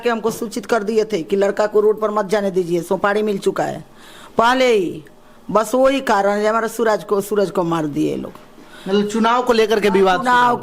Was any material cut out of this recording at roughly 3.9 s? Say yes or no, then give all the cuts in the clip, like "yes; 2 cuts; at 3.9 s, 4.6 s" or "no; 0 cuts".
no; 0 cuts